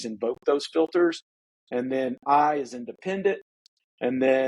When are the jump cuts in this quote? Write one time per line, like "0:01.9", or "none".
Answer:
0:03.5